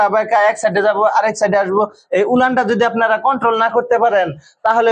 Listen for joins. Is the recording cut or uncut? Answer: uncut